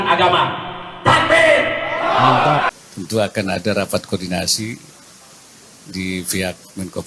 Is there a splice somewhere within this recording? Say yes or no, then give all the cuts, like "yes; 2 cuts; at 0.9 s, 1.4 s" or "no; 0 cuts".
yes; 1 cut; at 2.8 s